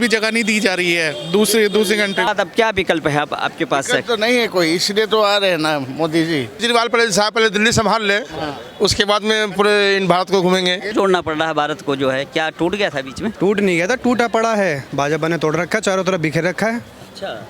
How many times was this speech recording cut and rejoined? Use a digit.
5